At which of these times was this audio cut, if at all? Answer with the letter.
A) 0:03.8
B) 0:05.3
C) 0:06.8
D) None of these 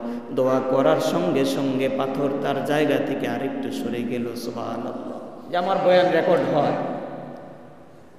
B